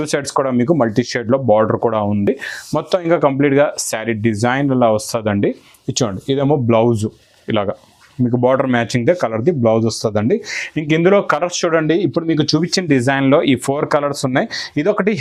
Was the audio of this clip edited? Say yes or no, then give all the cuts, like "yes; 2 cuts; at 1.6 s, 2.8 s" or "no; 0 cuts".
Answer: no; 0 cuts